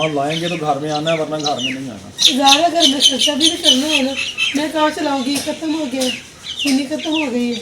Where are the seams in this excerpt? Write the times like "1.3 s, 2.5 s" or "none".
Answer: none